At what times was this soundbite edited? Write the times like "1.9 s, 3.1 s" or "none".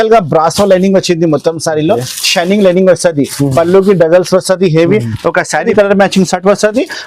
5.7 s